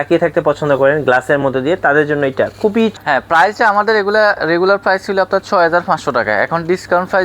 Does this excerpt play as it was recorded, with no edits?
no; 1 cut; at 2.9 s

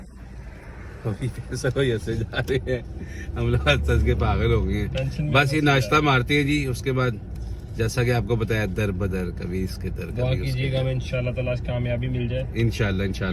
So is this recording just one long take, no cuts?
yes; 0 cuts

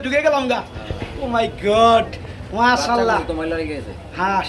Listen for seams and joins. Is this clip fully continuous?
yes; 0 cuts

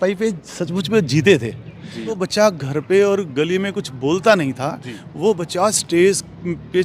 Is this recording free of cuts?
no; 1 cut; at 2.2 s

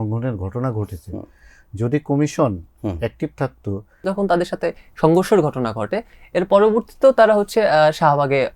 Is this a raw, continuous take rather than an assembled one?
no; 1 cut; at 4.0 s

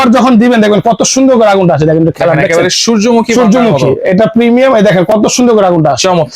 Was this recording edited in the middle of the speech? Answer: no; 0 cuts

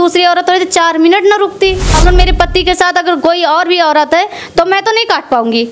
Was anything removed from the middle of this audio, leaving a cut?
yes; 1 cut; at 1.9 s

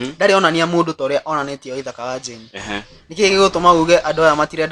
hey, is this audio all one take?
yes; 0 cuts

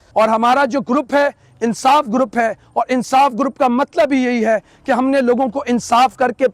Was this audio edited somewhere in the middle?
no; 0 cuts

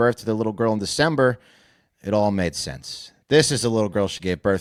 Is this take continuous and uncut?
yes; 0 cuts

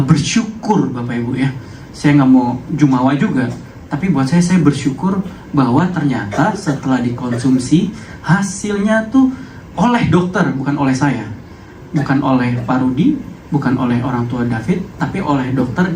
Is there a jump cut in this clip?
no; 0 cuts

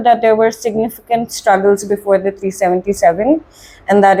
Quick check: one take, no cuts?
yes; 0 cuts

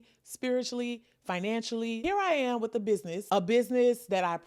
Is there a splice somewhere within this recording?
yes; 2 cuts; at 2.0 s, 3.1 s

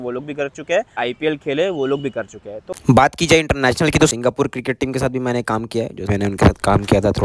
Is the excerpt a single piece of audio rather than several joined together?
no; 3 cuts; at 1.0 s, 2.8 s, 6.1 s

